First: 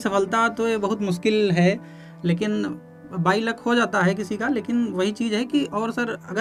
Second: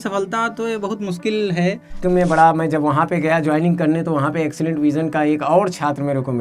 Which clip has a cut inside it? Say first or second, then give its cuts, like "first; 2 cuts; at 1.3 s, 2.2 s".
second; 1 cut; at 1.9 s